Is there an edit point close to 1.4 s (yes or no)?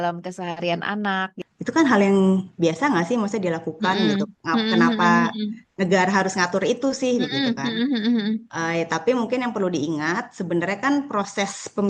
yes